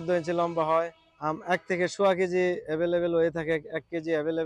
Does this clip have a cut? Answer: yes; 1 cut; at 1.1 s

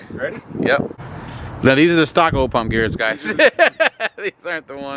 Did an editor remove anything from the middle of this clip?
yes; 1 cut; at 0.9 s

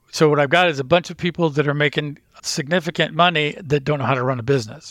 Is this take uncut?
no; 1 cut; at 2.3 s

